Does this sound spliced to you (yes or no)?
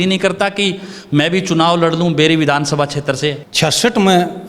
yes